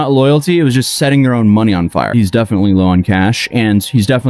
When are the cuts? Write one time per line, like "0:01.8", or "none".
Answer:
0:02.1